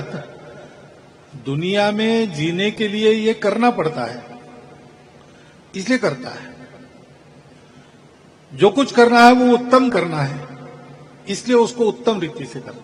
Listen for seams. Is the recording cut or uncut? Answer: uncut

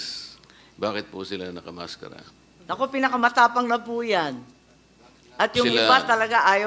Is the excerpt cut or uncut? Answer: uncut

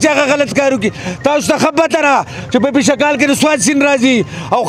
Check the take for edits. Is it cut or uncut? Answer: uncut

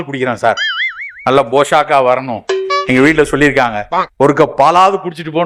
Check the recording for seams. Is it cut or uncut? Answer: uncut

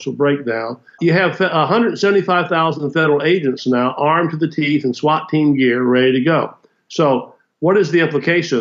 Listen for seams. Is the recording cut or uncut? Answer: cut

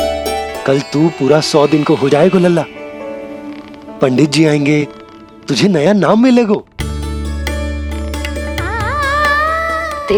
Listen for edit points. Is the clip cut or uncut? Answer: uncut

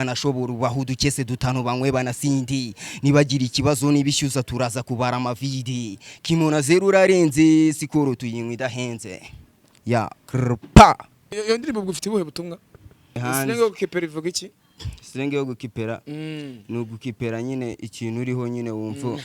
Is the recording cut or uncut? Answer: cut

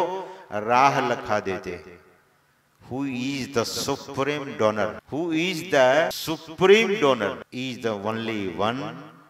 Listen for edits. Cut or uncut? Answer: cut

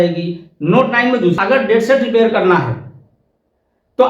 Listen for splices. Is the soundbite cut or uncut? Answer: cut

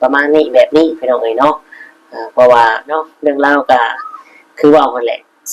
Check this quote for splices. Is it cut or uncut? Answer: cut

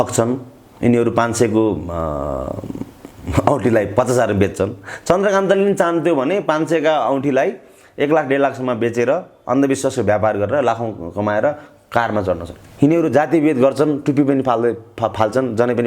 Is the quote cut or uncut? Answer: cut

